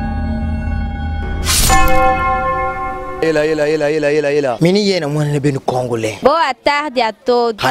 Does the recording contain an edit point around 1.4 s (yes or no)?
yes